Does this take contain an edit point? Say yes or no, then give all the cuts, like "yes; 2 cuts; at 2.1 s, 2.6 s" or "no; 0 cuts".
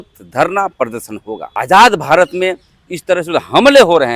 yes; 1 cut; at 1.4 s